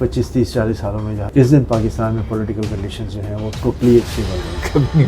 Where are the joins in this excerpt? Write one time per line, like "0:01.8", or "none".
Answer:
0:01.1